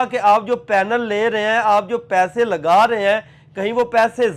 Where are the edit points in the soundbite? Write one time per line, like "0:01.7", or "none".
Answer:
none